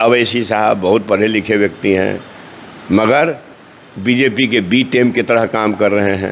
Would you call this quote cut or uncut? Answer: uncut